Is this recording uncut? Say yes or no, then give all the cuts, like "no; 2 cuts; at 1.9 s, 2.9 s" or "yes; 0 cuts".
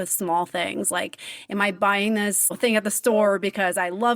no; 1 cut; at 2.4 s